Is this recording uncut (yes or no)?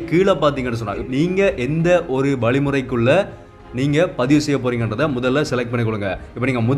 no